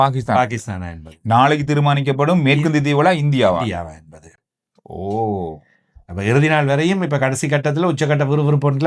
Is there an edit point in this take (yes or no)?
no